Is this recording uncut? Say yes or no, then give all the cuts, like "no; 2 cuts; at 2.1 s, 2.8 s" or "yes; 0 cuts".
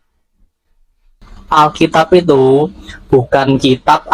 no; 1 cut; at 1.3 s